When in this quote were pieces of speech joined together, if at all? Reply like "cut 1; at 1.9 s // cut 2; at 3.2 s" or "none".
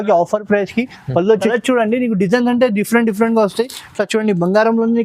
cut 1; at 1.5 s